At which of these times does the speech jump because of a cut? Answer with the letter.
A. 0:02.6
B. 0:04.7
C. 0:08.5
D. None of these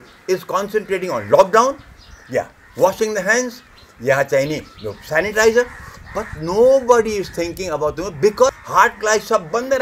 C